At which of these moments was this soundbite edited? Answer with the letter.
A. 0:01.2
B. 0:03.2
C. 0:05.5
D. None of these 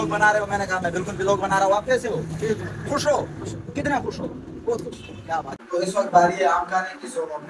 C